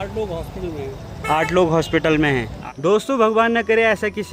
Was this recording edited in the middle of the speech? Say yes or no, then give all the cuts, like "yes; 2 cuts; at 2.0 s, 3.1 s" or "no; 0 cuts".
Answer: yes; 1 cut; at 2.6 s